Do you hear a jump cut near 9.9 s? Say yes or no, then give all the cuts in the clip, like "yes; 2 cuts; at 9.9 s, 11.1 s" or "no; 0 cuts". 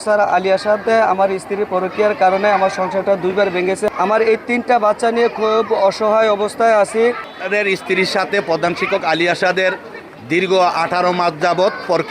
no; 2 cuts; at 3.9 s, 7.3 s